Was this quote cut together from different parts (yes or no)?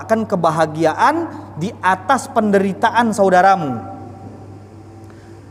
no